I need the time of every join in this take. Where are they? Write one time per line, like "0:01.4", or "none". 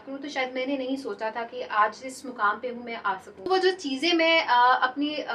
0:03.4